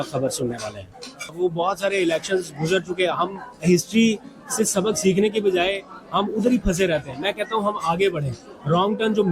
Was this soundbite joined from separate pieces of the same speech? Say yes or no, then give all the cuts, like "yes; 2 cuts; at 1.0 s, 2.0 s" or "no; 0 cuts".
yes; 1 cut; at 1.3 s